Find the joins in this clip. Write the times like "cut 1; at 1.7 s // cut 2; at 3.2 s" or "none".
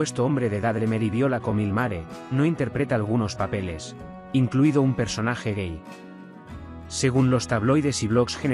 cut 1; at 5.8 s // cut 2; at 7.0 s